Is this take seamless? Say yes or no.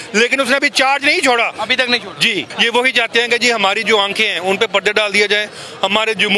no